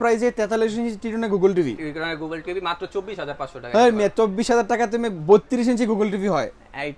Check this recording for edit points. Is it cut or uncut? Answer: uncut